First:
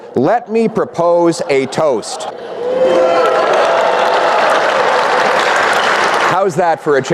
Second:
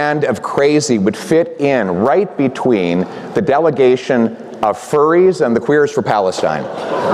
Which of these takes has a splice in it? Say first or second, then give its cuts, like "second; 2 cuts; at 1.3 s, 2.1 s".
first; 1 cut; at 2.3 s